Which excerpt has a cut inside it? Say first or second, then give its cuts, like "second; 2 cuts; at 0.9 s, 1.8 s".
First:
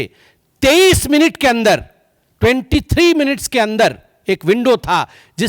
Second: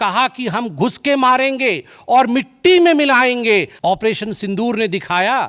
second; 1 cut; at 3.7 s